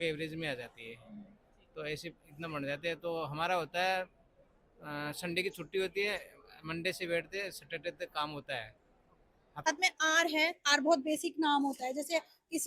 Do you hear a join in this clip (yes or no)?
yes